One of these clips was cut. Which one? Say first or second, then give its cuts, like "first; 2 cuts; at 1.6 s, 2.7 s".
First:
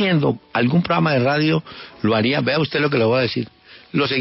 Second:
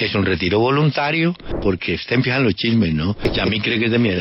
second; 2 cuts; at 1.5 s, 3.2 s